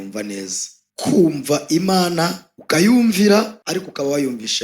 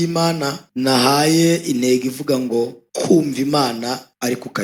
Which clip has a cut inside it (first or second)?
first